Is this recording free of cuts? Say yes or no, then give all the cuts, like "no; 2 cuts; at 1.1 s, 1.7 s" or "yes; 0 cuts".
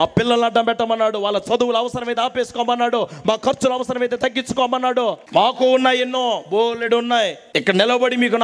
no; 2 cuts; at 5.2 s, 7.4 s